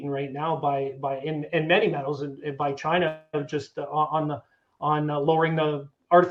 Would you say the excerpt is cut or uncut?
uncut